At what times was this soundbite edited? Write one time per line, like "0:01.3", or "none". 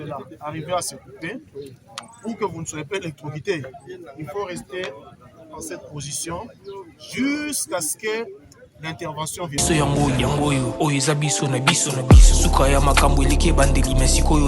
0:09.6